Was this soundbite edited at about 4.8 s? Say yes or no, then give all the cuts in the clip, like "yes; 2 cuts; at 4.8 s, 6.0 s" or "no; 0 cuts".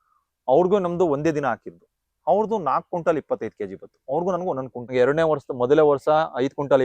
yes; 1 cut; at 4.8 s